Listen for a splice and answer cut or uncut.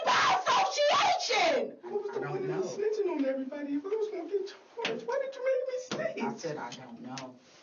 cut